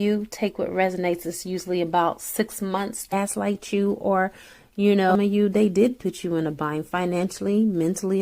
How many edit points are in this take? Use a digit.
2